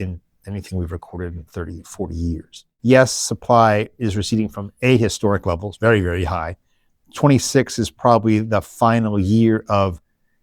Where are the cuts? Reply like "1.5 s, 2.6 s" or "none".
2.6 s